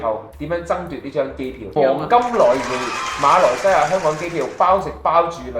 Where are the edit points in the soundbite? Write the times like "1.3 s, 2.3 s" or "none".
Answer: 1.7 s

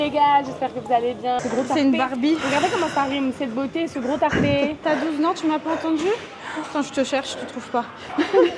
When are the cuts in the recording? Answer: 1.4 s, 4.8 s

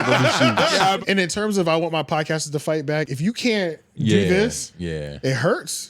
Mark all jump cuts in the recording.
1.0 s, 3.1 s, 4.7 s

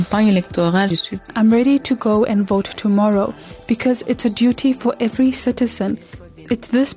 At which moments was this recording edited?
1.3 s

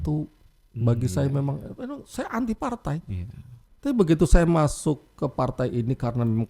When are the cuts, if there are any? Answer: none

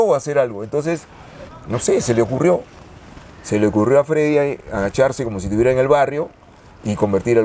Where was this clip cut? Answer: none

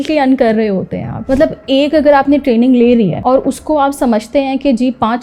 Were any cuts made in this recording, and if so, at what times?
1.6 s

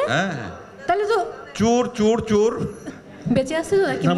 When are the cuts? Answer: 2.8 s

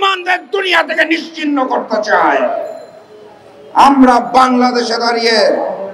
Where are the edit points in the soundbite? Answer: none

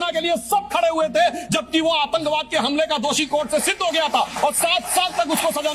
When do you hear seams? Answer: none

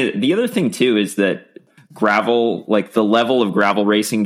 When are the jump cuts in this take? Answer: 1.7 s

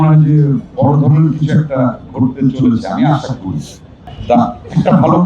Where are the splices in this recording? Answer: 4.1 s

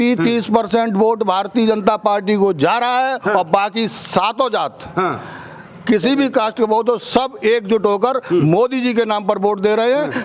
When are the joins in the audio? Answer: none

